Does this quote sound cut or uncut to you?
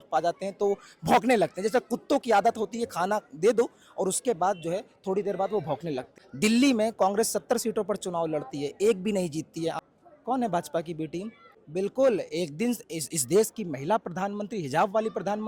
cut